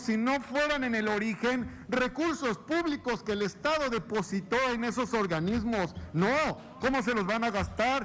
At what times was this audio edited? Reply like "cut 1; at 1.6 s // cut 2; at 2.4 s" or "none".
none